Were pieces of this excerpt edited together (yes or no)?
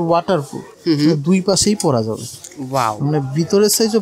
no